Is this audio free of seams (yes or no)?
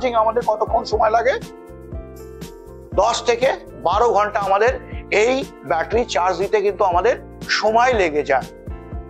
yes